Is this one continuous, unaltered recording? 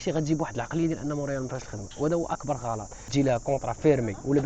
no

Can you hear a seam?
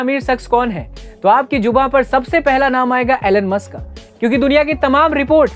no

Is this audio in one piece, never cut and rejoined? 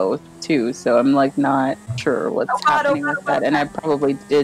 no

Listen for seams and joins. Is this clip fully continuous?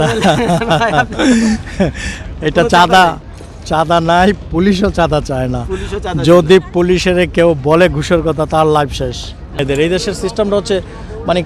no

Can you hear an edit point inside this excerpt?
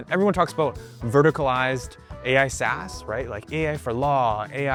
no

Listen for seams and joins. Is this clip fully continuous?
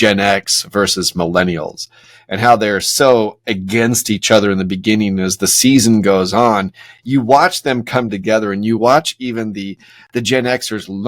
yes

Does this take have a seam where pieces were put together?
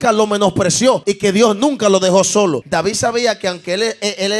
yes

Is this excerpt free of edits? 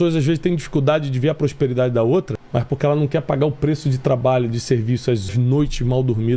no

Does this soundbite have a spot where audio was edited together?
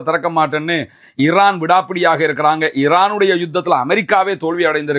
no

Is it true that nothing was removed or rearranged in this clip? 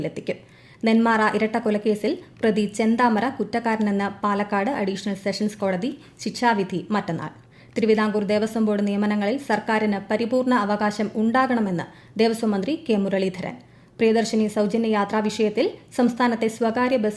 yes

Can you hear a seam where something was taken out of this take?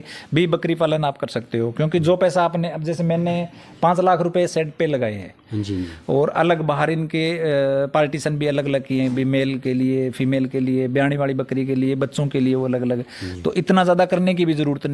no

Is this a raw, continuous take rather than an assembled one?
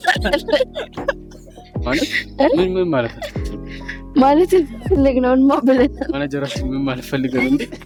yes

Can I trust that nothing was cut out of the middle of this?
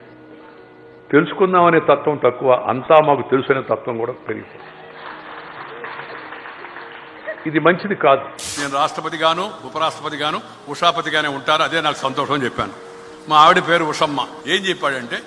no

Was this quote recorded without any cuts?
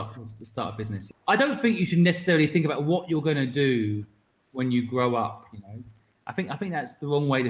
no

